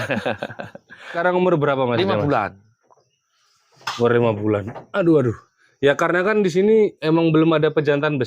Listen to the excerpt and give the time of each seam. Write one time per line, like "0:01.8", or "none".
0:01.1